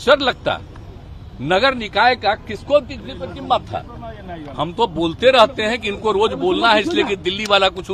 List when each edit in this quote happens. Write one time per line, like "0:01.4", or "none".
none